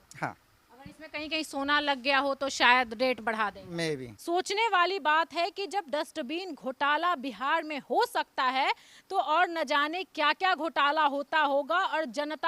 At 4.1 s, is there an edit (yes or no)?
yes